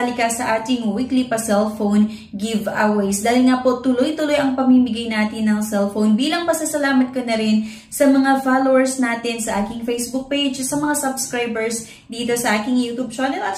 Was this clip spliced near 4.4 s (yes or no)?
no